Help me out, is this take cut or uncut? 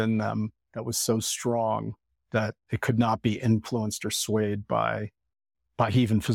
cut